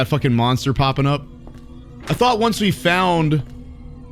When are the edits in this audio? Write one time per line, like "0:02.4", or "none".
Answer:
none

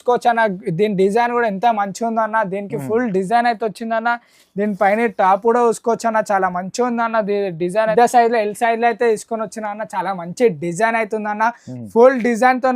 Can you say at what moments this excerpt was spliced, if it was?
0:07.9

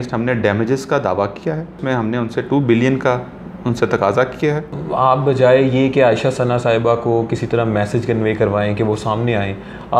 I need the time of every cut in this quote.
0:01.8
0:04.8

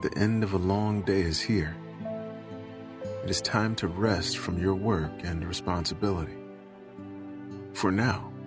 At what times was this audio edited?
0:01.9
0:03.3

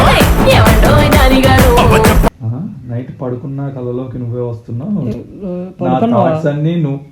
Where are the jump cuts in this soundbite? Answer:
0:02.3

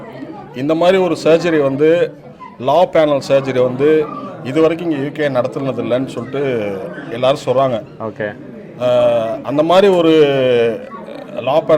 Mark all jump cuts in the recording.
none

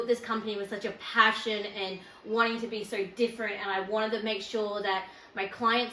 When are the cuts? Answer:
none

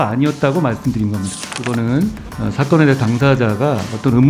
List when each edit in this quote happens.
0:01.5

